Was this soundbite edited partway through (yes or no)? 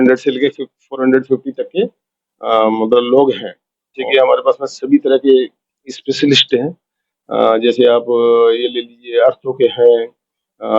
yes